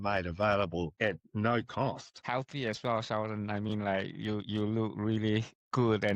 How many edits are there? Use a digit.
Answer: 2